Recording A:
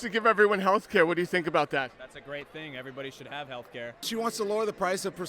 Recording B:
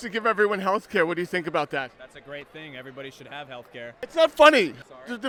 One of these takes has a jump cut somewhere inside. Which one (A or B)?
A